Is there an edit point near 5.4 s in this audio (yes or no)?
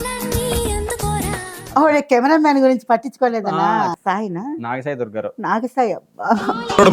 no